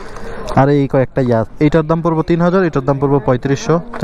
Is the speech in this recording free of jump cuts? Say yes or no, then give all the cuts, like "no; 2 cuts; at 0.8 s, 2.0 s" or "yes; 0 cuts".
no; 1 cut; at 1.5 s